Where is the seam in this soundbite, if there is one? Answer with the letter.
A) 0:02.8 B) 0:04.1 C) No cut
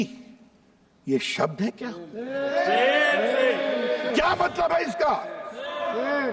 B